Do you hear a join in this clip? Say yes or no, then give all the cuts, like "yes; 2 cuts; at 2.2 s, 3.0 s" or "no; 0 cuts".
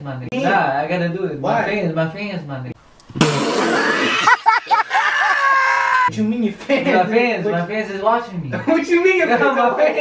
no; 0 cuts